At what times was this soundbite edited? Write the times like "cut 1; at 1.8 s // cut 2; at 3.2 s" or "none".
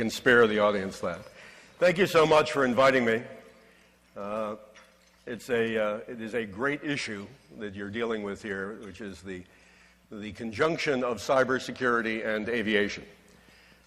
none